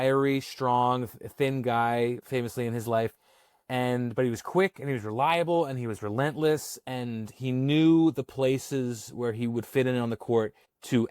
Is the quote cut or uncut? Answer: cut